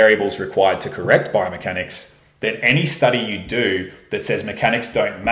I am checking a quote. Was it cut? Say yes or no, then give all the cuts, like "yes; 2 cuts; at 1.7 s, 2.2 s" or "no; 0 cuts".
no; 0 cuts